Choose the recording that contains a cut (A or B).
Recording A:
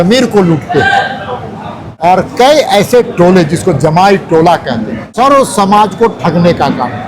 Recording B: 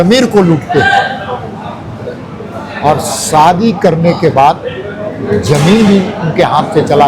A